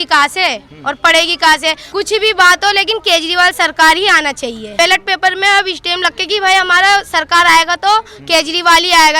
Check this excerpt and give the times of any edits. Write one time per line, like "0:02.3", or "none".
0:01.8
0:04.7